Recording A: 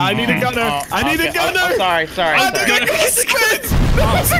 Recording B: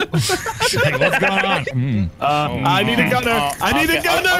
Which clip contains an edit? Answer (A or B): B